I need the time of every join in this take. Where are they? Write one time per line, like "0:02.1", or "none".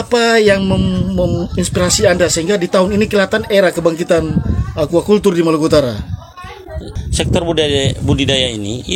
0:07.0